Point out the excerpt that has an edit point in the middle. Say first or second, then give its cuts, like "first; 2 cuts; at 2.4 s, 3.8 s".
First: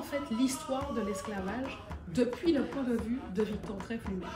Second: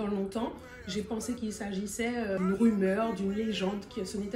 second; 1 cut; at 2.4 s